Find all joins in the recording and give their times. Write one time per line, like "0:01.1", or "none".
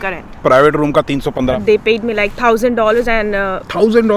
0:01.6